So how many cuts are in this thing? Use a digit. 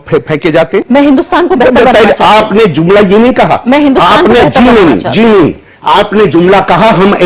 0